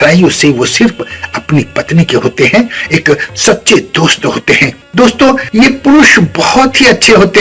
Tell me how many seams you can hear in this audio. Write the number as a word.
two